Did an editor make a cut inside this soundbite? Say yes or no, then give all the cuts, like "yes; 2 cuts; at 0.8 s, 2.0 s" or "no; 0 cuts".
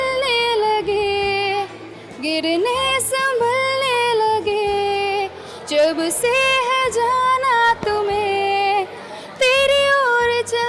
no; 0 cuts